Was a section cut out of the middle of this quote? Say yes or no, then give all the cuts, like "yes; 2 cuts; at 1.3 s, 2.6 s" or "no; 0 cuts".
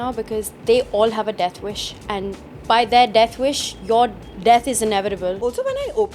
yes; 2 cuts; at 4.3 s, 5.4 s